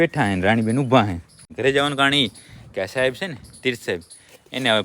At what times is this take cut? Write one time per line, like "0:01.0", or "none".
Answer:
0:01.5